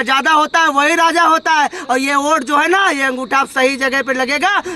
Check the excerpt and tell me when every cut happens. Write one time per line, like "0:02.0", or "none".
none

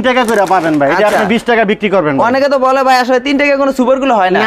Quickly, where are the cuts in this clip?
none

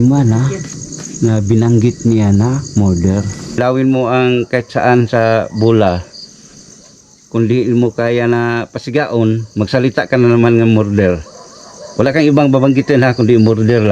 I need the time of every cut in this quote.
0:03.6

